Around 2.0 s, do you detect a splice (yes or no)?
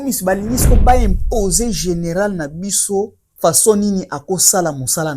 no